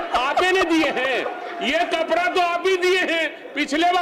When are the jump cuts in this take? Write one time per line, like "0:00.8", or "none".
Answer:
none